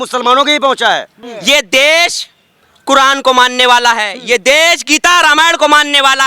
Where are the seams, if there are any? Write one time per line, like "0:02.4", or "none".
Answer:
0:01.3

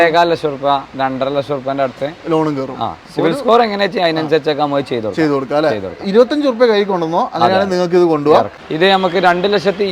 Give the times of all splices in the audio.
0:08.6

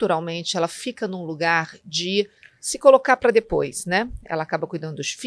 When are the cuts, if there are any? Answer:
none

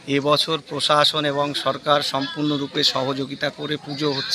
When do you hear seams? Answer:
none

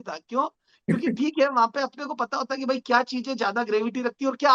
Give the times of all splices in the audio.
none

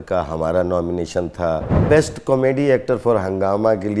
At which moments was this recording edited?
0:01.7

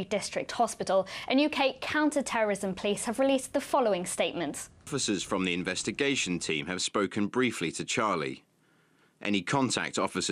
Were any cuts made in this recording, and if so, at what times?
none

